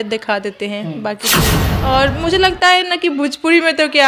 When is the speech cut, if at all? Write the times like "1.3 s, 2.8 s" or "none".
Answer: 1.6 s